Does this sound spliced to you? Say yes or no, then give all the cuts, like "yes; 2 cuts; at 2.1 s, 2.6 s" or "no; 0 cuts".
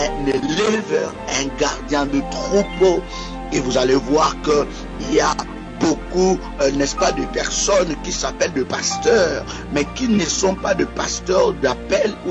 no; 0 cuts